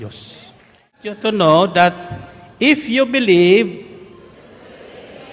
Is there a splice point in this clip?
yes; 1 cut; at 1.1 s

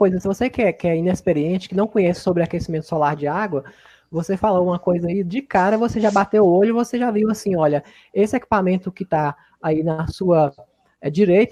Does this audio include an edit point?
no; 0 cuts

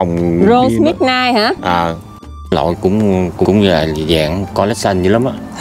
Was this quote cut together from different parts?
yes; 2 cuts; at 2.2 s, 3.5 s

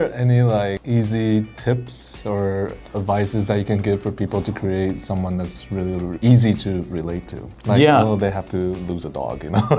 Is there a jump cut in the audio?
no; 0 cuts

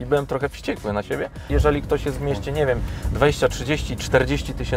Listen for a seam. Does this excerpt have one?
yes; 1 cut; at 1.5 s

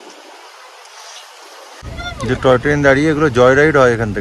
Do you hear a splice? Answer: yes; 1 cut; at 1.8 s

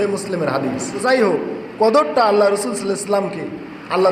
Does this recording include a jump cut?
yes; 1 cut; at 1.0 s

